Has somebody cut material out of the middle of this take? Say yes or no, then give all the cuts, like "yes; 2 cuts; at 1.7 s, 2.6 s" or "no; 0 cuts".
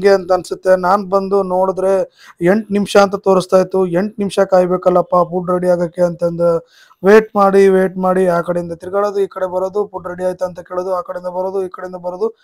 no; 0 cuts